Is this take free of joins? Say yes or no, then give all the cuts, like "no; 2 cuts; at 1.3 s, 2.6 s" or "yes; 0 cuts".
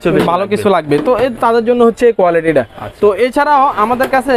yes; 0 cuts